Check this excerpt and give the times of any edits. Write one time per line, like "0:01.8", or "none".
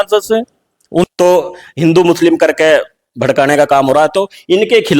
0:01.0